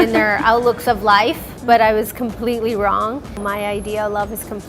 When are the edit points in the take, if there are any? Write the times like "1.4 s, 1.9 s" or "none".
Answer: 3.4 s